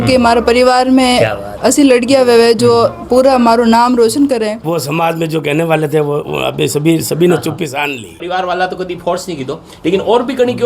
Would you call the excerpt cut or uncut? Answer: cut